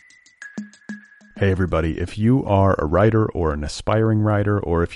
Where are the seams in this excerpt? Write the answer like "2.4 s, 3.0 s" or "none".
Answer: 0.9 s